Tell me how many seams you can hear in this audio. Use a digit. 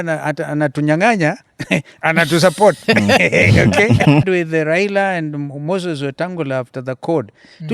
1